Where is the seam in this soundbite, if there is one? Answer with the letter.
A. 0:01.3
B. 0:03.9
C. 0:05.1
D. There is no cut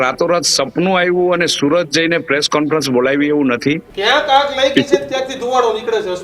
B